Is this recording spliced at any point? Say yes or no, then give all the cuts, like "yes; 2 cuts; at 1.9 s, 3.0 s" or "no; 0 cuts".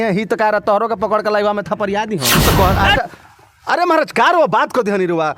yes; 1 cut; at 2.4 s